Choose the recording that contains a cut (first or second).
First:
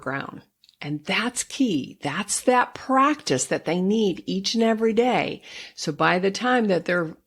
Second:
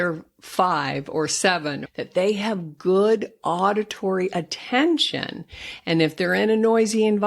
second